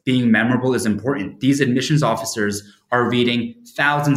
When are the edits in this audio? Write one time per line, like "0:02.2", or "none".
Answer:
none